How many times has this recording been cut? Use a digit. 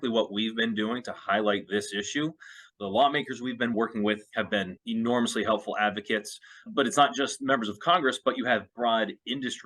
2